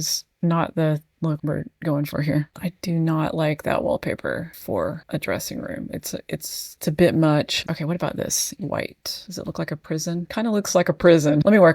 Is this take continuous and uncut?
no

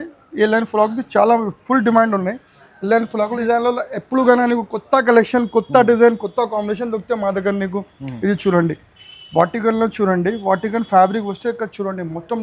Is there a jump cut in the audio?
yes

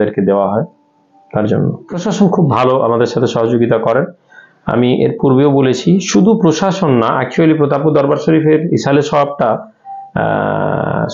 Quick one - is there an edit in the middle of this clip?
yes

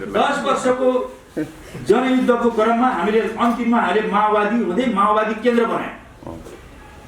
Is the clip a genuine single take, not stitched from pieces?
yes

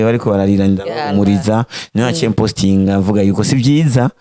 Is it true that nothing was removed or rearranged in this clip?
yes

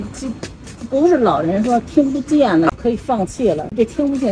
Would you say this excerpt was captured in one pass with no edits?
no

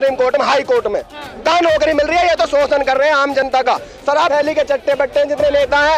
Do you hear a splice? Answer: yes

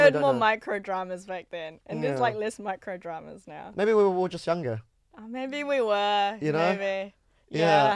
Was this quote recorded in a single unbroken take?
yes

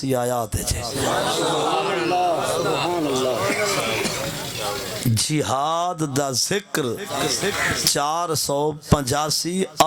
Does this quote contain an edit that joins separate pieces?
no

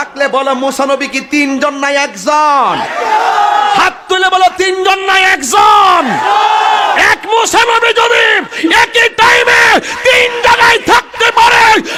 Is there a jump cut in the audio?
no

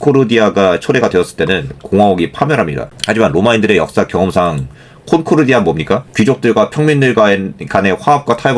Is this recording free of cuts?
no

